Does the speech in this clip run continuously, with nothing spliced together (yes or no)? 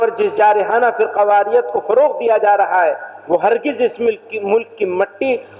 yes